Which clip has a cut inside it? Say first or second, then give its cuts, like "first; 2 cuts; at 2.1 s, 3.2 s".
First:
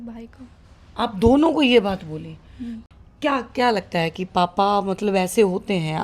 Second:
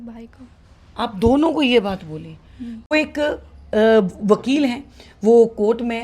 second; 1 cut; at 2.9 s